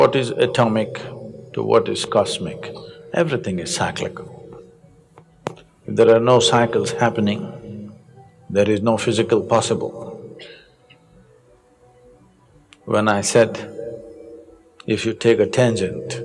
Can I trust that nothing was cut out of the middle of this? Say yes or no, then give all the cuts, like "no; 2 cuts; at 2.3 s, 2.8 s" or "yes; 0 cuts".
yes; 0 cuts